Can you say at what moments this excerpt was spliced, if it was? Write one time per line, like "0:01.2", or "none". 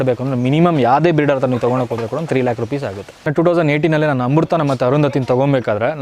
0:03.3